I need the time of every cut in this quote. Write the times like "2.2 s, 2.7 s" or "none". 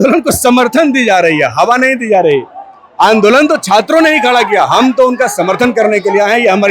none